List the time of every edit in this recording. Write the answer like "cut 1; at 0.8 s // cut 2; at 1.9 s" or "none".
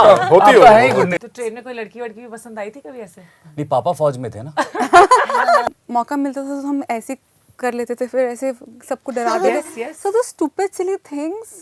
cut 1; at 1.1 s // cut 2; at 5.6 s